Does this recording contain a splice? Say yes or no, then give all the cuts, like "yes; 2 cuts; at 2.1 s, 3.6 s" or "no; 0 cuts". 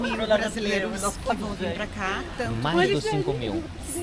no; 0 cuts